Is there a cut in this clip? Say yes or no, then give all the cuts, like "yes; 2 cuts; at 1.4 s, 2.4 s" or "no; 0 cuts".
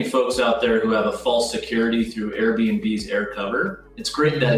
no; 0 cuts